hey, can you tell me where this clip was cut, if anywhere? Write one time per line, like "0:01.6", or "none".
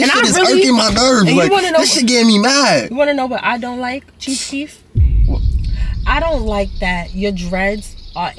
none